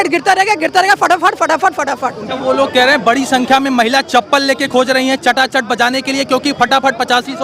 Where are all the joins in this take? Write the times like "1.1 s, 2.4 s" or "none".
2.2 s